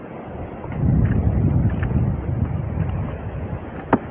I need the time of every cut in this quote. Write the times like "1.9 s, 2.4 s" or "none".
none